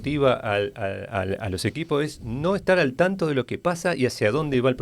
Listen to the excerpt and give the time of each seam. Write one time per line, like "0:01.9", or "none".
none